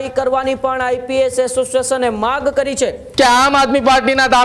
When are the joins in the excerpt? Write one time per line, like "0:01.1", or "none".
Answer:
0:03.0

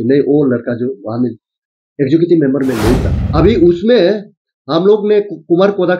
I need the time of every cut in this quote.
0:03.2

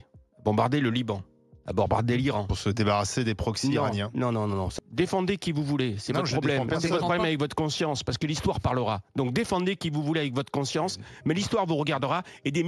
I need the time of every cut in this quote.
0:04.7

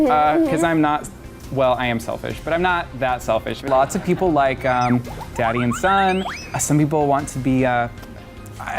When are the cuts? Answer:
0:03.6

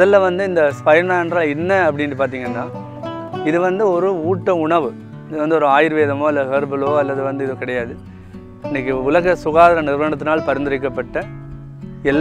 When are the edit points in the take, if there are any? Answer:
none

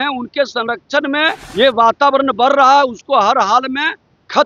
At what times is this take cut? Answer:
0:01.4

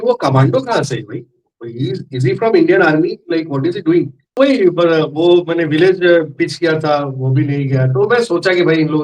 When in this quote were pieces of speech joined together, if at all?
0:04.2

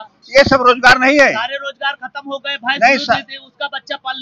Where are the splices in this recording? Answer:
none

